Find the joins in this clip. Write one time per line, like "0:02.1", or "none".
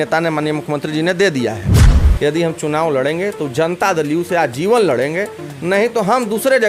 0:01.9